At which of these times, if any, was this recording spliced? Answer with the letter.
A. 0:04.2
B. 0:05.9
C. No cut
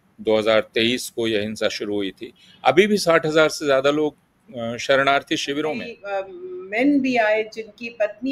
B